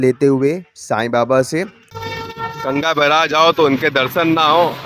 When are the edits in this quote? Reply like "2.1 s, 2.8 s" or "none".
1.8 s